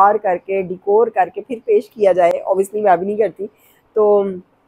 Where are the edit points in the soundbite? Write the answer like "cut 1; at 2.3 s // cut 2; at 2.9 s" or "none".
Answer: none